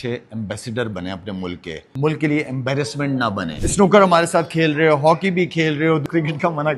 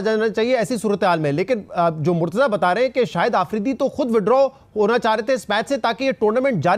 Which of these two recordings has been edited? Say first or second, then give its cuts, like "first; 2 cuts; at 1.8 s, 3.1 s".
first; 3 cuts; at 1.8 s, 3.6 s, 6.1 s